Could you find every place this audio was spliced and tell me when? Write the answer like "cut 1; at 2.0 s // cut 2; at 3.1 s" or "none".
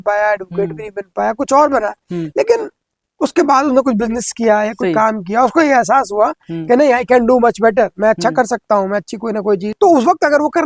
cut 1; at 9.7 s